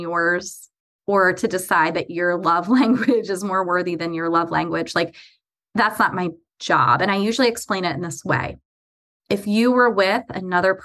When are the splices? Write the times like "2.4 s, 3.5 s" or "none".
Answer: none